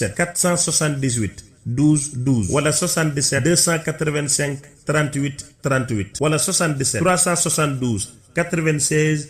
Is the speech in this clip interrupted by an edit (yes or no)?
yes